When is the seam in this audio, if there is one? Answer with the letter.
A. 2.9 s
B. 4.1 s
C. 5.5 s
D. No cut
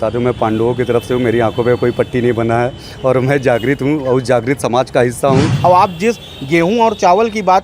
C